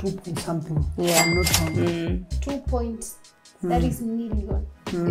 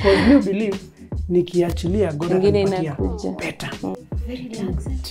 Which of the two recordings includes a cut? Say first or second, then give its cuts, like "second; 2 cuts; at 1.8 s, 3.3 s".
second; 1 cut; at 3.9 s